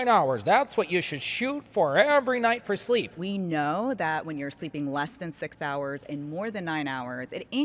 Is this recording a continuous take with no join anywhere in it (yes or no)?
no